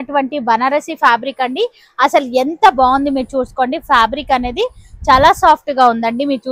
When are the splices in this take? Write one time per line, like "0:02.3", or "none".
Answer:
none